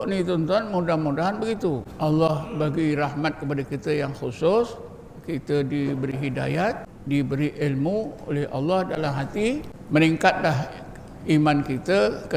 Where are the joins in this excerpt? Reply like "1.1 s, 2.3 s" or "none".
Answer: 1.9 s, 6.9 s, 9.7 s

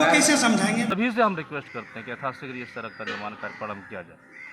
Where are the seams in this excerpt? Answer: 0.9 s

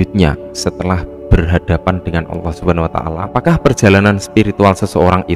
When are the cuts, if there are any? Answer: 3.2 s

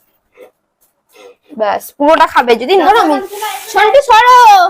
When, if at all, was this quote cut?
2.8 s

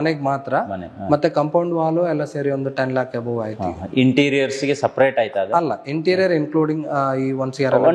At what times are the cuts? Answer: none

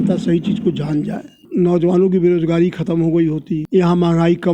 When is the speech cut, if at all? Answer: 1.4 s, 3.6 s

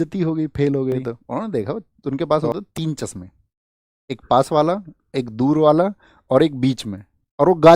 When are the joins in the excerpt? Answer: 1.2 s

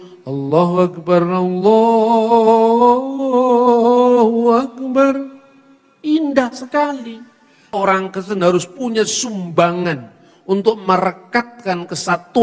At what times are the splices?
7.7 s

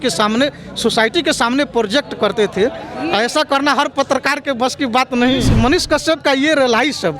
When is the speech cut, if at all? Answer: 5.5 s

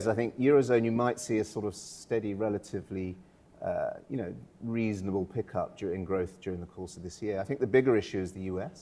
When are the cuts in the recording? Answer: none

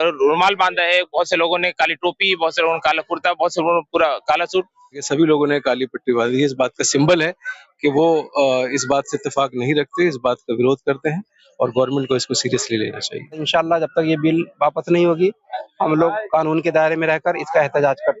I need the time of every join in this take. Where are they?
5.0 s, 13.4 s

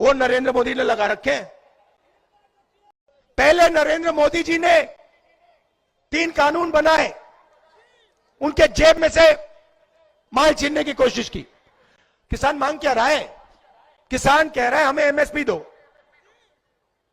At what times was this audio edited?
2.9 s

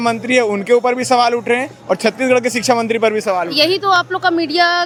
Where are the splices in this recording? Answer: none

